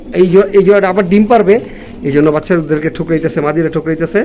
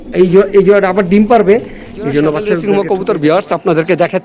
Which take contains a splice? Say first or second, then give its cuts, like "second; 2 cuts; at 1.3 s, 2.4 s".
second; 1 cut; at 2.6 s